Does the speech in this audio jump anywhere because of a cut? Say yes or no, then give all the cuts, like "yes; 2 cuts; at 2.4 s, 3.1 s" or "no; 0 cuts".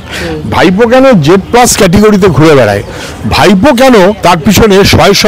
yes; 1 cut; at 4.2 s